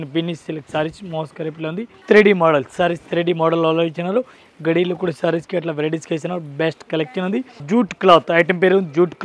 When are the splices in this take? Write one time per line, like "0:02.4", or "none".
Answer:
0:01.9
0:07.6

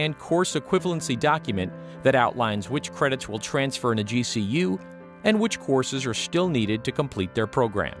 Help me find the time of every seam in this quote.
0:01.7

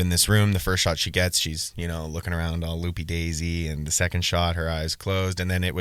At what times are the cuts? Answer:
none

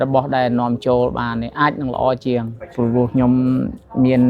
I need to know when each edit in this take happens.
0:02.6

